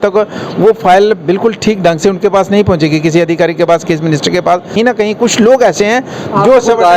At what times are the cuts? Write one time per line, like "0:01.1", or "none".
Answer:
0:04.7